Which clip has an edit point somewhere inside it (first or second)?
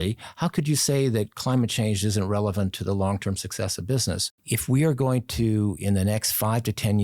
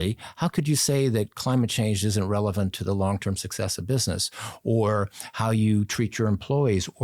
first